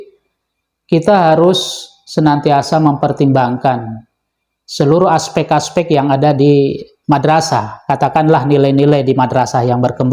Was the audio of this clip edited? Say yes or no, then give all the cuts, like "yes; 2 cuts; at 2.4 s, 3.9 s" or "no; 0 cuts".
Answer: no; 0 cuts